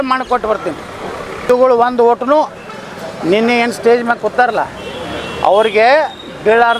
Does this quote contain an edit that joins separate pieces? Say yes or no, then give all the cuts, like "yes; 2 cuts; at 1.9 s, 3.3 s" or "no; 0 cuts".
yes; 1 cut; at 1.4 s